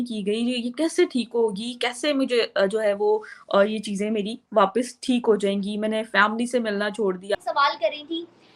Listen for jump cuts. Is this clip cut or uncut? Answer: cut